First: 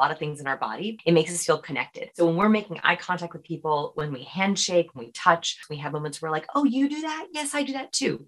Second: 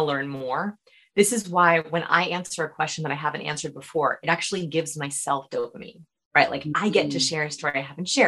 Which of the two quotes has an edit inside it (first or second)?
first